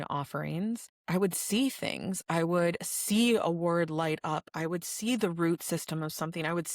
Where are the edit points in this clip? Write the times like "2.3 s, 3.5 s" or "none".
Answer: 0.9 s